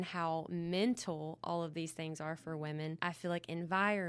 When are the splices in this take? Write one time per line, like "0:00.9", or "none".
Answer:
0:03.0

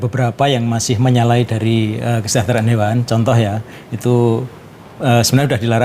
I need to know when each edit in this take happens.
none

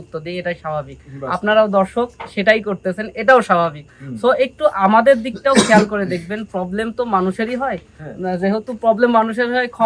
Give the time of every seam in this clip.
none

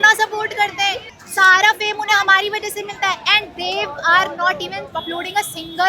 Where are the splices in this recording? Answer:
0:01.1

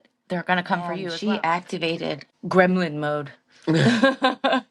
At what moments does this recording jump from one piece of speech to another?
0:01.1
0:02.3

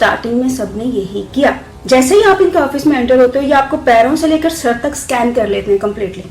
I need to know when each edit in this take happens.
0:01.7

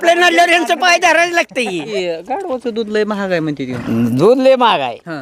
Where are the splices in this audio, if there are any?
0:01.9

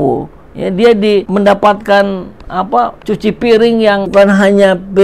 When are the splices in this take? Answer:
0:01.3
0:03.0
0:04.1

